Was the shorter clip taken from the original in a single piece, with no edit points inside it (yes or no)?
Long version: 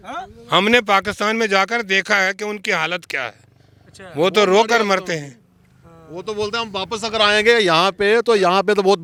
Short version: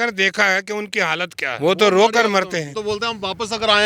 no